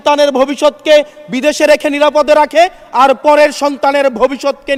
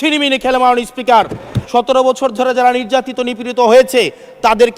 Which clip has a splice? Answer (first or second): second